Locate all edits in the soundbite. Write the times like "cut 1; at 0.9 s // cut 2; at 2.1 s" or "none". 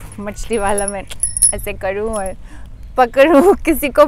none